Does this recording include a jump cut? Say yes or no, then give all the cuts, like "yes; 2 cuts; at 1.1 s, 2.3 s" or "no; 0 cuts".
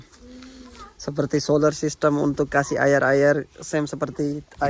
no; 0 cuts